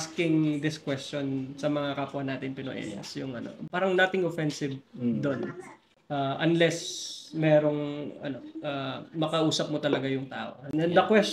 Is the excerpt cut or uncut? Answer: uncut